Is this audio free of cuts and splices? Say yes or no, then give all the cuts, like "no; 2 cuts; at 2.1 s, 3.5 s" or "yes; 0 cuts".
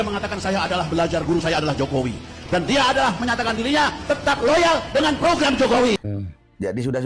no; 1 cut; at 6.1 s